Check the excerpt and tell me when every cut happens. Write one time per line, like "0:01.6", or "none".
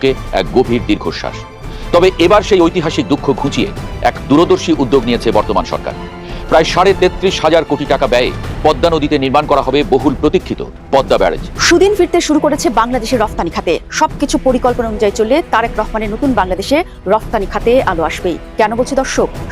0:11.5